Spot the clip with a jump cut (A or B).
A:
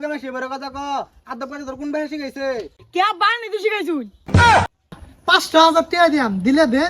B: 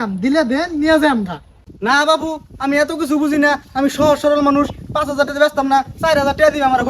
A